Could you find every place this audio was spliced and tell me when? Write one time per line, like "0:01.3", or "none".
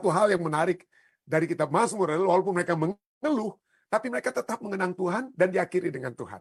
none